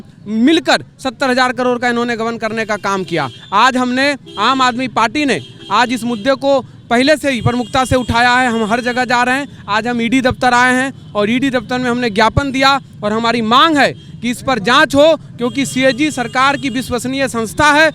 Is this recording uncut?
yes; 0 cuts

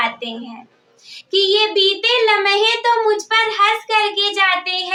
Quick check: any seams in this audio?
no; 0 cuts

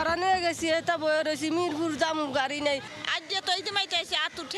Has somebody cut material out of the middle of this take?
no; 0 cuts

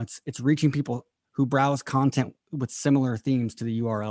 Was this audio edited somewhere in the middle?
no; 0 cuts

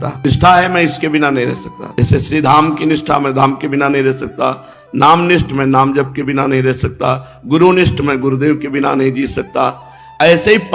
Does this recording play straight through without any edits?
yes; 0 cuts

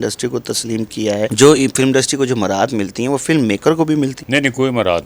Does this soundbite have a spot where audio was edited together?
no; 0 cuts

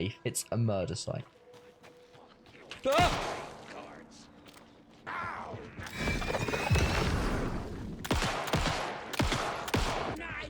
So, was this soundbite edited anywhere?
yes; 1 cut; at 1.4 s

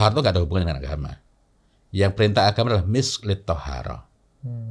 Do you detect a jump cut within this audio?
no; 0 cuts

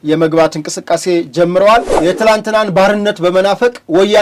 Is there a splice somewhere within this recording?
yes; 1 cut; at 1.9 s

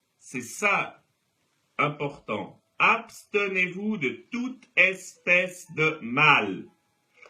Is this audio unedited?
yes; 0 cuts

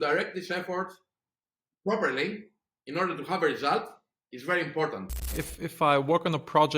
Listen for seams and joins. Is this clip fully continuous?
no; 1 cut; at 5.4 s

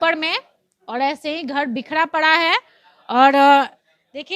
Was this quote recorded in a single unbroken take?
yes; 0 cuts

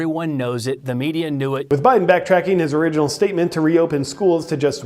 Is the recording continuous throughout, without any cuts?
no; 1 cut; at 1.6 s

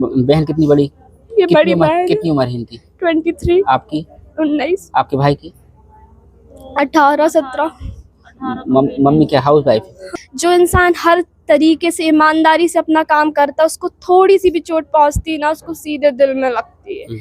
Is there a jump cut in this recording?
yes; 1 cut; at 10.0 s

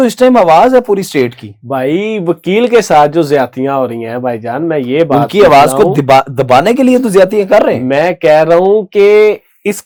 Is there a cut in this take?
no; 0 cuts

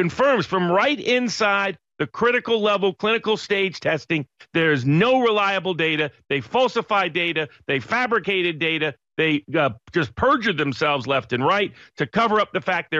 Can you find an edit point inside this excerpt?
no; 0 cuts

